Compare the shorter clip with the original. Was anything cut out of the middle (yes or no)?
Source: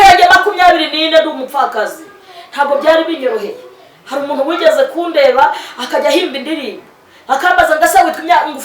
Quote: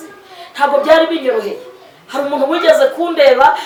no